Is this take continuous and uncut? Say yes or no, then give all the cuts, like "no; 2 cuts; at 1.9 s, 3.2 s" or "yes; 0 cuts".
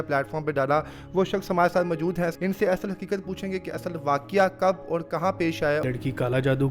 no; 2 cuts; at 2.3 s, 5.8 s